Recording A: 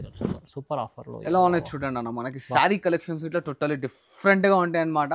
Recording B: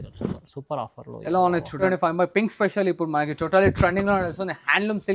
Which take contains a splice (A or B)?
B